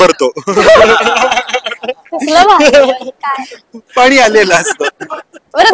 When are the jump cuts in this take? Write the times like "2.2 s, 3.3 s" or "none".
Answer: none